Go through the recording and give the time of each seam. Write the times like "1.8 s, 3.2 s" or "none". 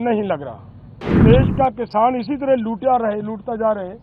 1.2 s